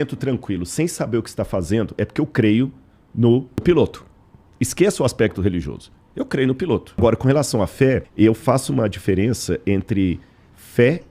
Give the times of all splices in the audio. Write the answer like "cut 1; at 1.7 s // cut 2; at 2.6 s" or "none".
cut 1; at 3.6 s // cut 2; at 7.0 s // cut 3; at 8.1 s